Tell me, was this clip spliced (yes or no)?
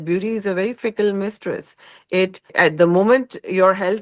yes